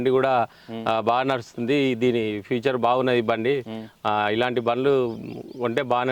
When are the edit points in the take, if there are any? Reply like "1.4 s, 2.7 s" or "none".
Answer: none